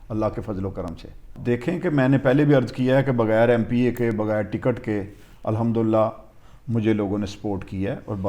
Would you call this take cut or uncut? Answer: cut